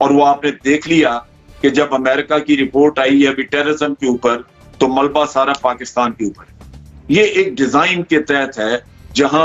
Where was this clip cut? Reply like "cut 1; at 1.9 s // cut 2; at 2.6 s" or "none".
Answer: none